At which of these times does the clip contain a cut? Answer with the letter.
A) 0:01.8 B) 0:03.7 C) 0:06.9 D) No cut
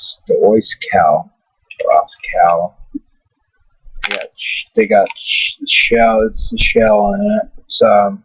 A